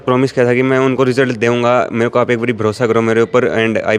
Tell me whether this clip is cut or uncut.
uncut